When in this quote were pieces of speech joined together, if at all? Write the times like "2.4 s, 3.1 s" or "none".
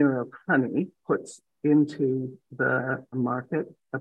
0.9 s